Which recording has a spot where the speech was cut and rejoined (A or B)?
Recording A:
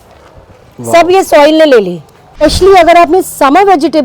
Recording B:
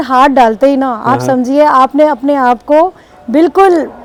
A